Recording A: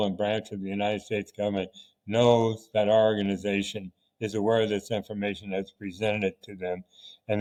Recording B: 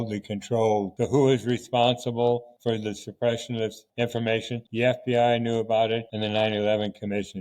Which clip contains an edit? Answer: B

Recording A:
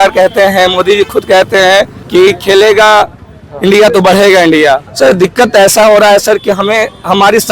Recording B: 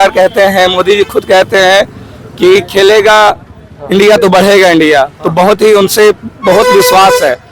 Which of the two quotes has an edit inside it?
A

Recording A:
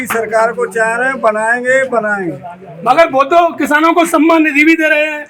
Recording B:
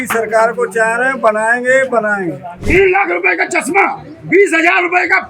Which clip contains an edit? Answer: B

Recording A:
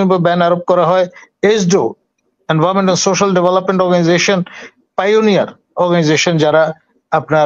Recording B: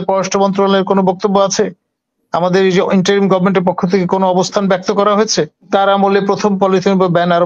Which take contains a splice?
B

